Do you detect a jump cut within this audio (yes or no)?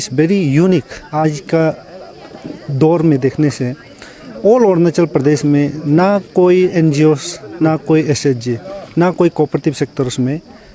yes